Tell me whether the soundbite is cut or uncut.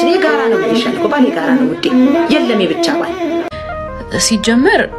cut